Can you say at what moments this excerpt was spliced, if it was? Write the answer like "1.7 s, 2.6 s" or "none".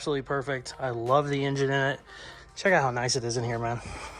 none